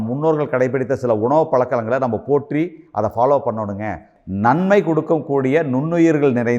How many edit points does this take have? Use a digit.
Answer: 1